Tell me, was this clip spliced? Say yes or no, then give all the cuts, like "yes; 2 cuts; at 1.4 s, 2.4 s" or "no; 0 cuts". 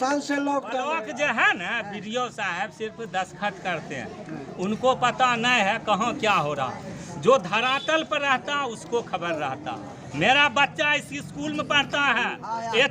yes; 1 cut; at 1.0 s